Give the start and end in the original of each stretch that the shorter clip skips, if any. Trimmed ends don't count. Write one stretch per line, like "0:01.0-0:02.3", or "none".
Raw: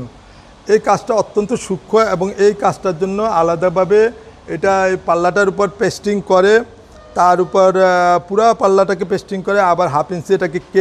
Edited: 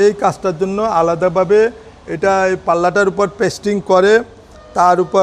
none